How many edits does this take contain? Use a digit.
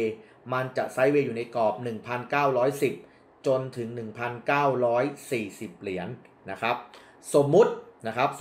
0